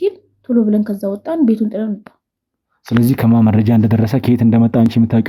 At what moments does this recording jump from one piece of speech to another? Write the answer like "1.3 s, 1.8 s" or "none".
none